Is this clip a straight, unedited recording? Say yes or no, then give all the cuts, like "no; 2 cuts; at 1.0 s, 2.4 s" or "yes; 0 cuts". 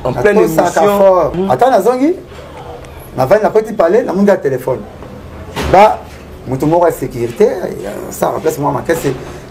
no; 1 cut; at 1.3 s